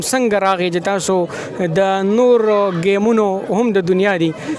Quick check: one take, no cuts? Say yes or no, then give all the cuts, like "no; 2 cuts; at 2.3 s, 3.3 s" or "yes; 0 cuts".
yes; 0 cuts